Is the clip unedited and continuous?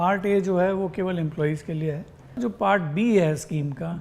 no; 1 cut; at 2.4 s

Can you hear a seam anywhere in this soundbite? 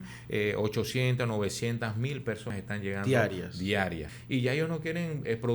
yes; 2 cuts; at 2.5 s, 4.1 s

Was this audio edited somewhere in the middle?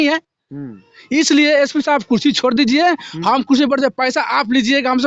no; 0 cuts

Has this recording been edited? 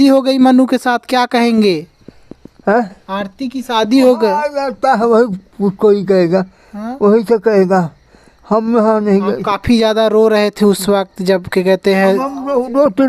no; 0 cuts

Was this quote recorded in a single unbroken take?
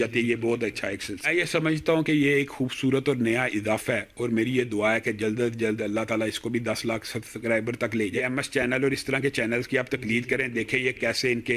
no; 2 cuts; at 1.3 s, 8.2 s

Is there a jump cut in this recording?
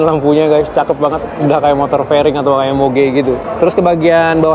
no; 0 cuts

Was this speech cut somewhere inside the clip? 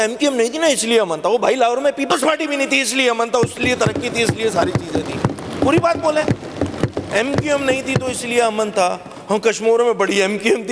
no; 0 cuts

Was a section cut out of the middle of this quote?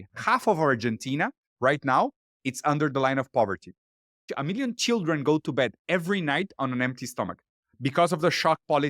yes; 1 cut; at 4.2 s

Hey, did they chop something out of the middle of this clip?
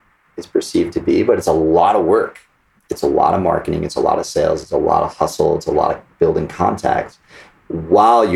no; 0 cuts

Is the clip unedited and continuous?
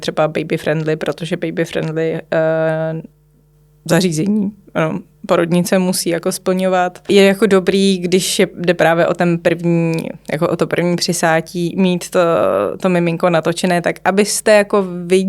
no; 1 cut; at 7.1 s

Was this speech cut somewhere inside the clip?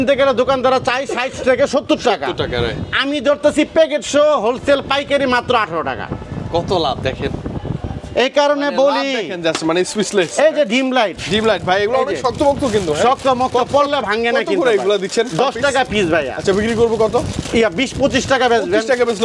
no; 0 cuts

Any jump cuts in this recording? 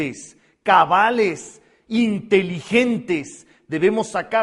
yes; 1 cut; at 1.7 s

